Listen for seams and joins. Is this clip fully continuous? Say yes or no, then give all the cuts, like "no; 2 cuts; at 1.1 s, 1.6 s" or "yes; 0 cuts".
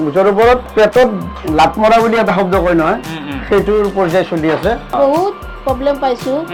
yes; 0 cuts